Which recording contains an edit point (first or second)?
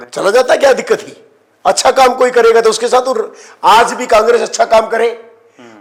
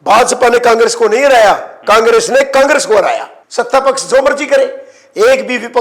second